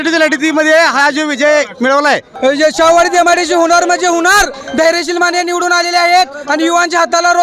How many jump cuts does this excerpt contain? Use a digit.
1